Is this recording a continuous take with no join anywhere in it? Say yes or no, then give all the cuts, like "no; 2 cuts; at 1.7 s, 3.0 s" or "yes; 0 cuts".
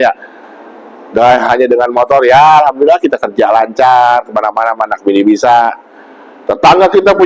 yes; 0 cuts